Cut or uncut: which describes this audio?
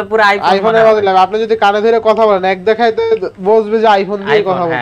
uncut